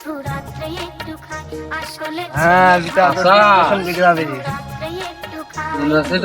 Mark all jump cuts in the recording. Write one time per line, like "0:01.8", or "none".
0:02.2